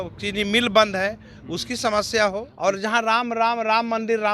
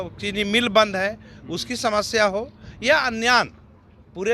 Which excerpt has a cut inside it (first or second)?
first